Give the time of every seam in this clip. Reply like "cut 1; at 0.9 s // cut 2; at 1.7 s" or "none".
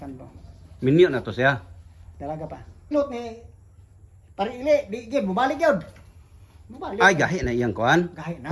cut 1; at 2.9 s